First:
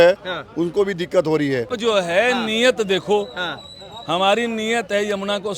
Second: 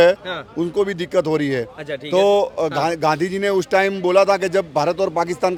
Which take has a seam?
first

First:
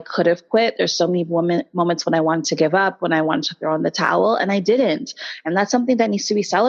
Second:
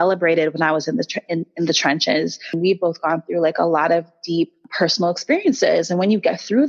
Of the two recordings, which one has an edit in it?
second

